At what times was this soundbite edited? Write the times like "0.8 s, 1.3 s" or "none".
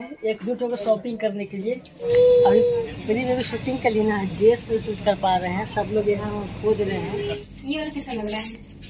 2.1 s, 7.4 s